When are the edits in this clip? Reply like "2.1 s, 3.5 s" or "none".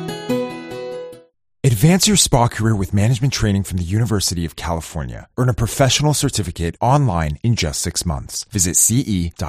1.1 s